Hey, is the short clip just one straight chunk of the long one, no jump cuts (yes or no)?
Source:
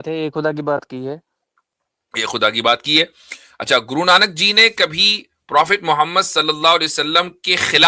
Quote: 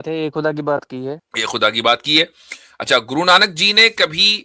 no